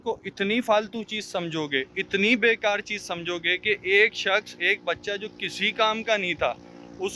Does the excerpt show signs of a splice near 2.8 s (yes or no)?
no